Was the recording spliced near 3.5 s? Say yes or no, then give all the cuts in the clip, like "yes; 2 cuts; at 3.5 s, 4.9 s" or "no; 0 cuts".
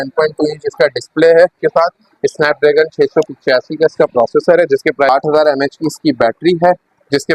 no; 2 cuts; at 1.6 s, 5.1 s